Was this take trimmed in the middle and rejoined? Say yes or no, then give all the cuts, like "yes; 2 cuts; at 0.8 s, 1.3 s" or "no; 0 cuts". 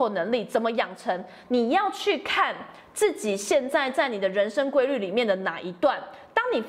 no; 0 cuts